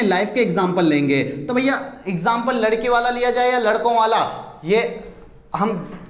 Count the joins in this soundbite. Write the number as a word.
zero